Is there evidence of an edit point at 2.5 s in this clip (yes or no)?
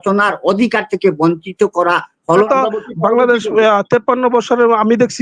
yes